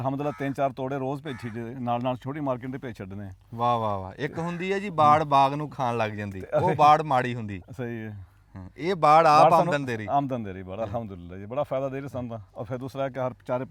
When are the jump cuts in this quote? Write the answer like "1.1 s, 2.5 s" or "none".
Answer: none